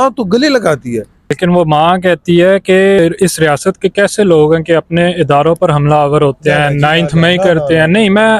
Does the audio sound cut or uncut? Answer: cut